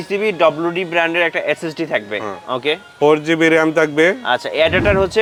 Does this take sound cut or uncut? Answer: uncut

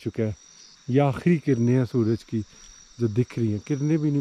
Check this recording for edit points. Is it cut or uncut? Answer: uncut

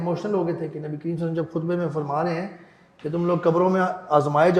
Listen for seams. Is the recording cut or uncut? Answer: uncut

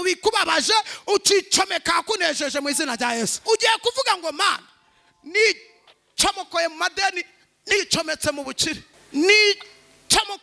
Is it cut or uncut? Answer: cut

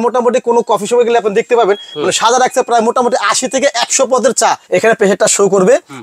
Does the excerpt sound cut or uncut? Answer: cut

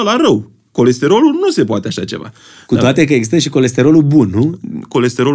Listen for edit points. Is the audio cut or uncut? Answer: uncut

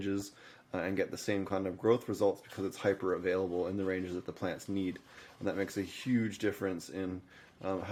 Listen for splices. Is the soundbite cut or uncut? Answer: uncut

